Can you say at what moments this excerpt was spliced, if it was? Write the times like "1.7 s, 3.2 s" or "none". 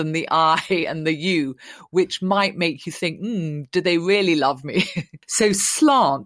5.2 s